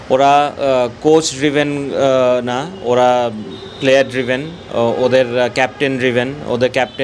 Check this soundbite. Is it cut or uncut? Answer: uncut